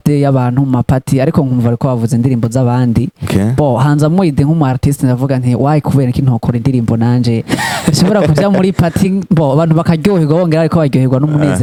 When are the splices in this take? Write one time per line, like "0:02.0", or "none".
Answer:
none